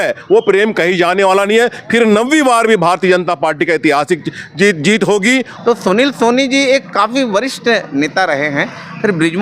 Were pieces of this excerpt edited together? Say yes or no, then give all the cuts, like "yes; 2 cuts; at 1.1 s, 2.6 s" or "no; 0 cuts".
yes; 1 cut; at 5.5 s